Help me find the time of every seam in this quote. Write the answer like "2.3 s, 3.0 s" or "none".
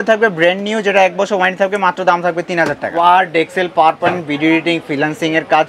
2.9 s